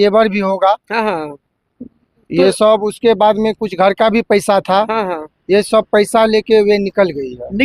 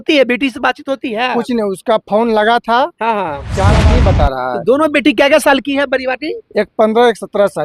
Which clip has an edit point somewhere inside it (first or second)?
second